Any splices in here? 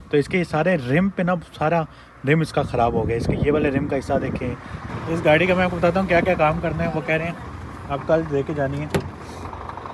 yes; 1 cut; at 5.0 s

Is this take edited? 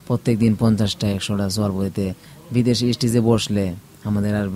no; 0 cuts

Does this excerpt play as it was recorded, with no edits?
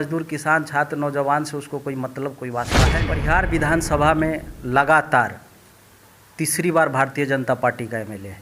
no; 1 cut; at 2.9 s

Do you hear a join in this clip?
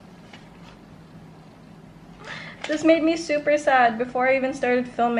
no; 0 cuts

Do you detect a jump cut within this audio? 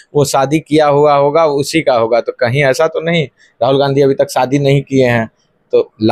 no; 0 cuts

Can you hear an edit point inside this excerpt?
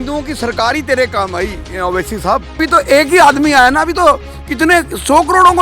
yes; 1 cut; at 2.6 s

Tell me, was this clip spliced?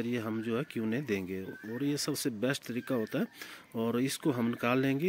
no; 0 cuts

